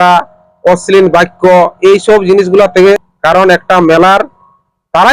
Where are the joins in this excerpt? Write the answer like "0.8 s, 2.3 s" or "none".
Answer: 3.0 s